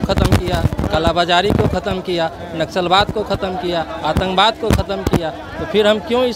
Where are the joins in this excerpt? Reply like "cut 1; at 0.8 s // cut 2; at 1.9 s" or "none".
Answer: none